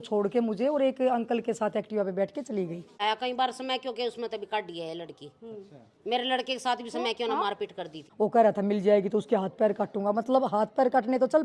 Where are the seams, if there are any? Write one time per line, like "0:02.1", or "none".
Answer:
0:03.0
0:08.0